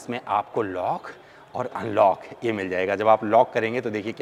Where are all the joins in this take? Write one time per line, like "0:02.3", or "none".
none